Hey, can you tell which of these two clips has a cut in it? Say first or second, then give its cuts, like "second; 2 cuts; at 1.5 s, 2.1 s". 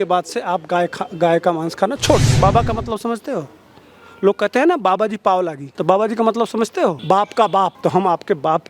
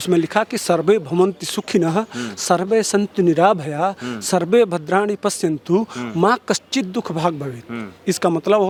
first; 4 cuts; at 2.3 s, 5.7 s, 7.0 s, 7.8 s